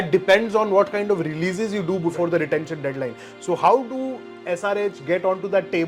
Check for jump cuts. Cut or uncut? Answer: uncut